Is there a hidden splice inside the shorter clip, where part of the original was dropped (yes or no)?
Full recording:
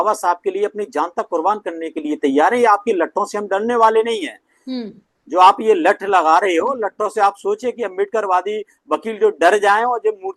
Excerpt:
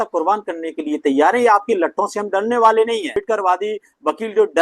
yes